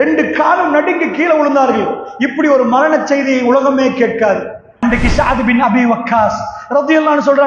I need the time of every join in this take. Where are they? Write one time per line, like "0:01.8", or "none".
0:04.6